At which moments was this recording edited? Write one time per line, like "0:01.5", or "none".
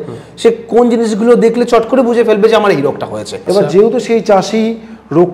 0:03.4